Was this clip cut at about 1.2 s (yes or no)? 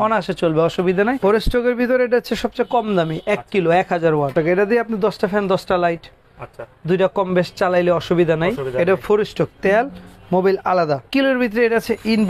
yes